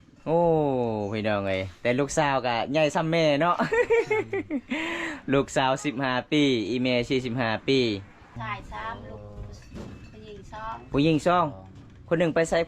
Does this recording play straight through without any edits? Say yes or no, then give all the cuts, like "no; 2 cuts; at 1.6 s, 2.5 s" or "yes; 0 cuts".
no; 1 cut; at 8.3 s